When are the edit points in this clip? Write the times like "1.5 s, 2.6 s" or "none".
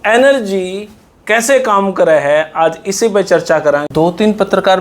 3.8 s